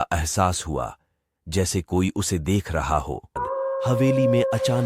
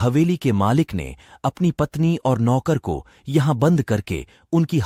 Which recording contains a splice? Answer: first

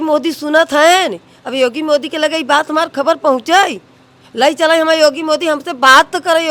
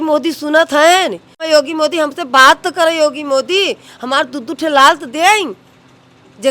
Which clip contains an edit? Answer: second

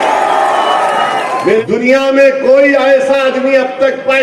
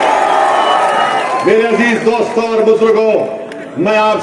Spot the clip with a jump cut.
first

